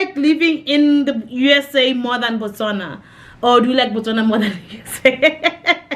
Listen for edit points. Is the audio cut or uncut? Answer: uncut